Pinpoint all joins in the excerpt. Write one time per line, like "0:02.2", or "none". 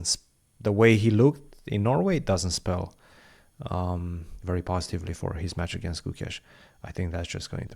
none